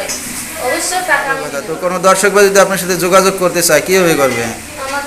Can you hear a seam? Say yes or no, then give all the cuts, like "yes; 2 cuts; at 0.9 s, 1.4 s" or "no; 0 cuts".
yes; 1 cut; at 1.7 s